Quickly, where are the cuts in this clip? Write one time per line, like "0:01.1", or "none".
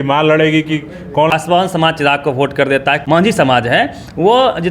0:01.3
0:03.0